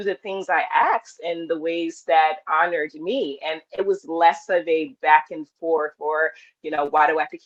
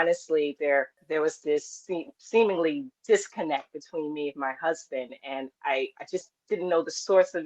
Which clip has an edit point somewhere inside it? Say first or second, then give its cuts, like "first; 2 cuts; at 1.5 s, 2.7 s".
second; 1 cut; at 1.0 s